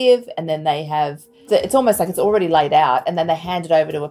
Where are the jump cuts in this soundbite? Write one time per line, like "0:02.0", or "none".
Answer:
0:01.4

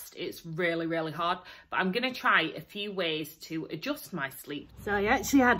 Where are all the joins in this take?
0:04.7

